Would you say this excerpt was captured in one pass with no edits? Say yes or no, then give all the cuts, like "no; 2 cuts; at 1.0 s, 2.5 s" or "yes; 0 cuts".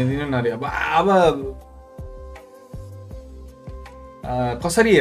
yes; 0 cuts